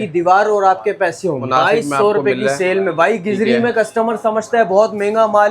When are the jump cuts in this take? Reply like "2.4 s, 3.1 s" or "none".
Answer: 1.4 s